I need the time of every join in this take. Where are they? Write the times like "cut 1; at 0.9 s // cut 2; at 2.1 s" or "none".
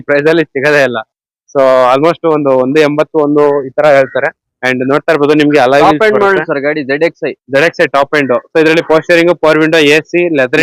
none